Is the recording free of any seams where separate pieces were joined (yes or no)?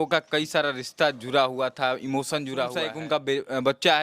no